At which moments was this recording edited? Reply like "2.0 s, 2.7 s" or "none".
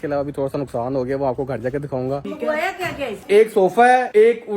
2.2 s, 3.2 s